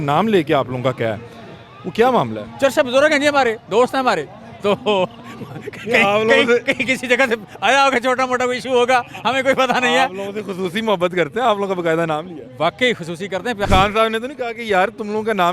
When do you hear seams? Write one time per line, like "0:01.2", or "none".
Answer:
0:13.6